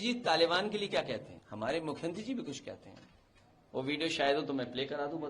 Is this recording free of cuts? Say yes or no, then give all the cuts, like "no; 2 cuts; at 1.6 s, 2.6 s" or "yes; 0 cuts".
no; 1 cut; at 1.4 s